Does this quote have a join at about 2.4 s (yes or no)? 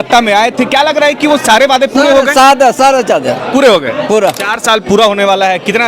no